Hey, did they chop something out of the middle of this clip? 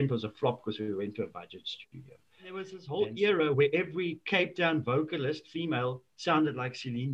yes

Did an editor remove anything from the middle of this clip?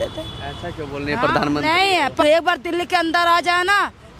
yes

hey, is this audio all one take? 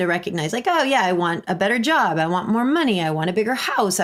yes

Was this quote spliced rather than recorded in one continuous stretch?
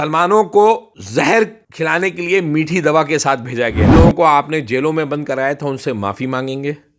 yes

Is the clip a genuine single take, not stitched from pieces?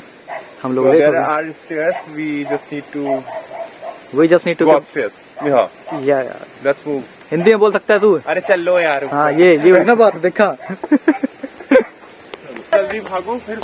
no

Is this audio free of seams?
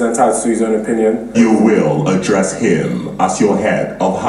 no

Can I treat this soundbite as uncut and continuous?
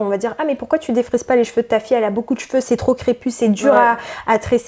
yes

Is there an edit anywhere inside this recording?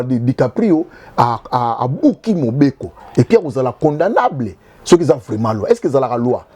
no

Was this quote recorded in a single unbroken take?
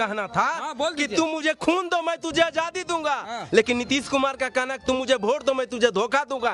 yes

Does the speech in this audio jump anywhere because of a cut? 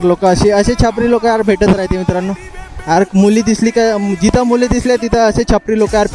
no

